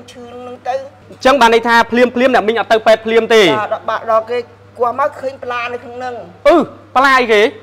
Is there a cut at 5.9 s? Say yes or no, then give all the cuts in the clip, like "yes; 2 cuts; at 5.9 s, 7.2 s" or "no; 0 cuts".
no; 1 cut; at 1.0 s